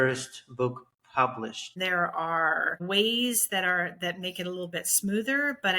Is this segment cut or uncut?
cut